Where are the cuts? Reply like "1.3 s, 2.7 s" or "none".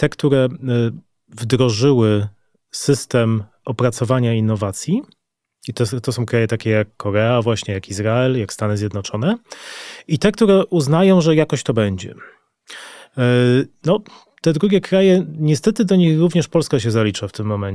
none